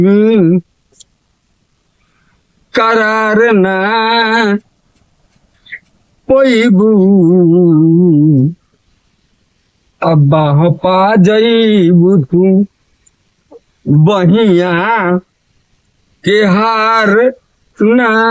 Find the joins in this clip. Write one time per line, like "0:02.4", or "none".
none